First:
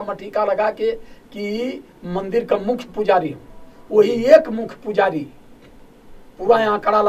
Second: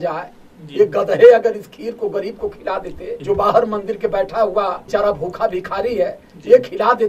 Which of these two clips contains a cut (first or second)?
second